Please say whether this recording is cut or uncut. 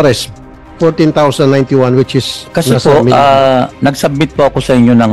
cut